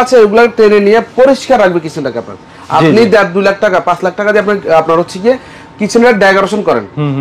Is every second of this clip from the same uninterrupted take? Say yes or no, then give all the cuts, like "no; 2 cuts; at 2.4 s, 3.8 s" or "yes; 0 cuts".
yes; 0 cuts